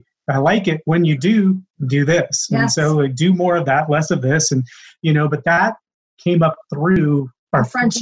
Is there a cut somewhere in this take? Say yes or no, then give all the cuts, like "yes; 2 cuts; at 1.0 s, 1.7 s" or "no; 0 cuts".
yes; 2 cuts; at 5.6 s, 7.0 s